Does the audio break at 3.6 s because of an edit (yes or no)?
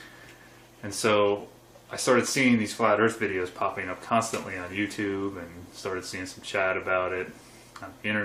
no